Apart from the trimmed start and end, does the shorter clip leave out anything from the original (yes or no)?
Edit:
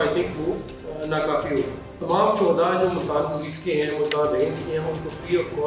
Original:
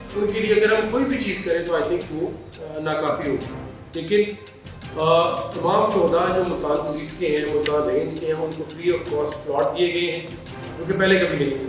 yes